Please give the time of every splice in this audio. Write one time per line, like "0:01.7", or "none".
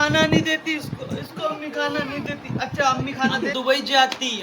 0:03.5